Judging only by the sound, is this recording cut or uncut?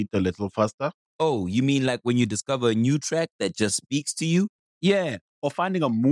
uncut